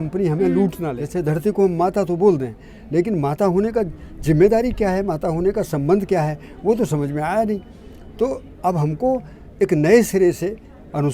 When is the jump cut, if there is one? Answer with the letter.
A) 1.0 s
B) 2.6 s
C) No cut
A